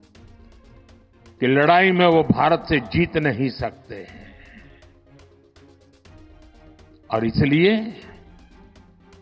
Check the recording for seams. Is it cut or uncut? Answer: uncut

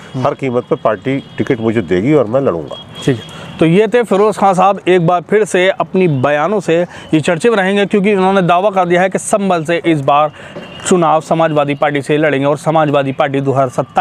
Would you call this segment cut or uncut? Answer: uncut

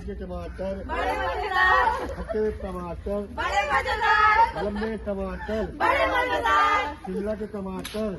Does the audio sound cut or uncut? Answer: uncut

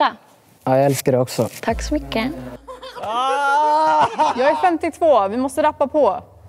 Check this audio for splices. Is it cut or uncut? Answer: cut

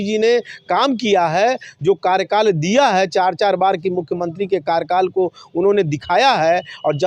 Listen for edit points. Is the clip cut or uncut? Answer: uncut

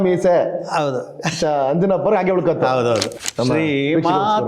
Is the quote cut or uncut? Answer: cut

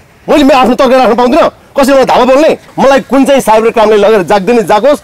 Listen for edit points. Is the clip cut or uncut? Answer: cut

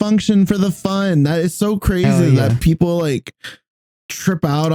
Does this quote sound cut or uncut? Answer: uncut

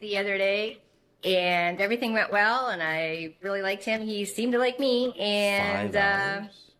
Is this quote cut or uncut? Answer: uncut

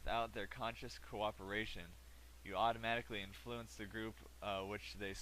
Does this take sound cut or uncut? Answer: cut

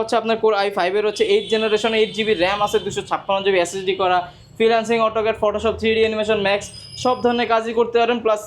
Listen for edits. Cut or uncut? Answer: uncut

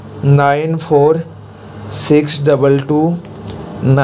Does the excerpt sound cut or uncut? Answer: uncut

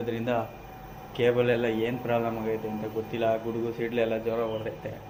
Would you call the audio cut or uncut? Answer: uncut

